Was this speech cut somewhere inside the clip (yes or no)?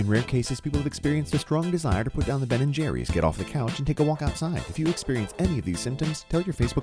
no